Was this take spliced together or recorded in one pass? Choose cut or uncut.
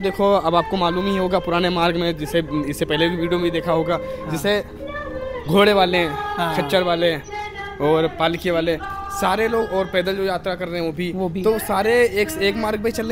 uncut